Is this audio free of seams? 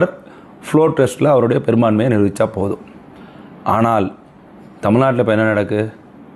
no; 1 cut; at 1.5 s

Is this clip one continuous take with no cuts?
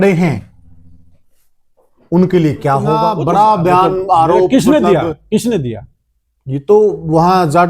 no; 1 cut; at 3.0 s

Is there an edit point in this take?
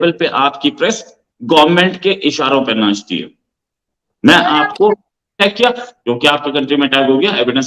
yes; 1 cut; at 5.4 s

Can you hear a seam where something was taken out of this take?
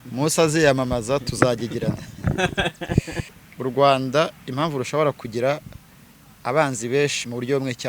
yes; 1 cut; at 3.3 s

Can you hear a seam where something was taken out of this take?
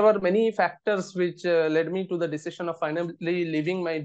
no; 0 cuts

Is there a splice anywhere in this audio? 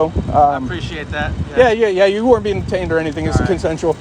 no; 0 cuts

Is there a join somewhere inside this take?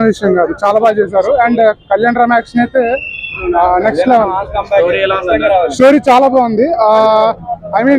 no; 0 cuts

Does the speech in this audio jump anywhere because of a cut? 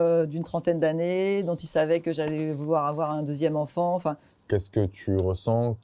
yes; 1 cut; at 4.3 s

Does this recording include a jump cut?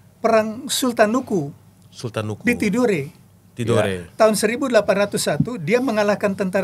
no; 0 cuts

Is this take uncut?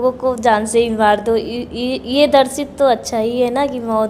yes; 0 cuts

